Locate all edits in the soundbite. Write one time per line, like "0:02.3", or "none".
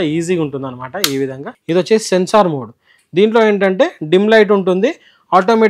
0:01.5